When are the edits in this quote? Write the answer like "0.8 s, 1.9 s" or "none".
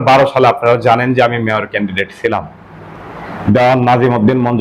none